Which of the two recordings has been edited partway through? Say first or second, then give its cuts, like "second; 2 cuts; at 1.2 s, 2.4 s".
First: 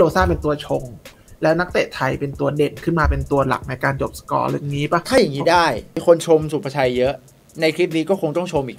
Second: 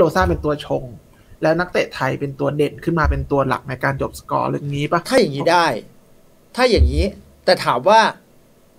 first; 1 cut; at 6.0 s